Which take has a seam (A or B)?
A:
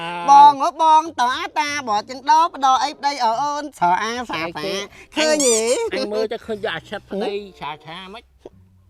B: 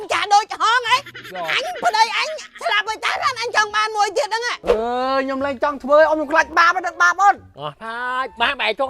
B